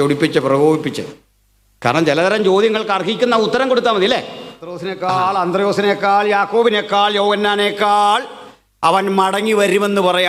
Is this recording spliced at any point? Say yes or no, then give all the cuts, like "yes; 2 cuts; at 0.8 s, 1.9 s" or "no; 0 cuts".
yes; 1 cut; at 4.9 s